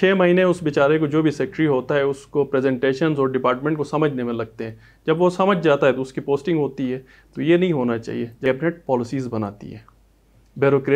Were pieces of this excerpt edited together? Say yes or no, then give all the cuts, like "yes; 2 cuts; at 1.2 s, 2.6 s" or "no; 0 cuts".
yes; 1 cut; at 8.4 s